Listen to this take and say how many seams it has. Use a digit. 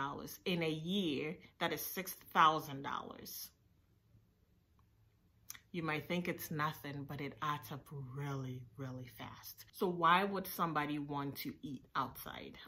1